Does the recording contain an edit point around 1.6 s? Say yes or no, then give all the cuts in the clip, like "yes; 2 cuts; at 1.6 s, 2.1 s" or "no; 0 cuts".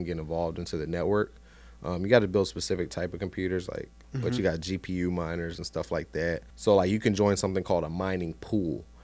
no; 2 cuts; at 4.0 s, 6.5 s